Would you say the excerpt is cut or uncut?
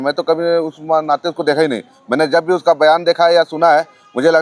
uncut